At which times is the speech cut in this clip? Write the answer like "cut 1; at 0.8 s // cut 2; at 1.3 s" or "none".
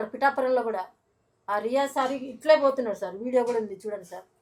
none